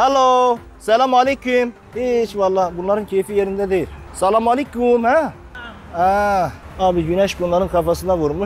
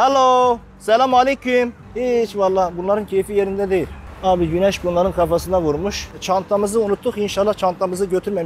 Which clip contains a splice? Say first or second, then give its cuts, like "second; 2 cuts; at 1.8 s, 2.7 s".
second; 2 cuts; at 4.1 s, 6.1 s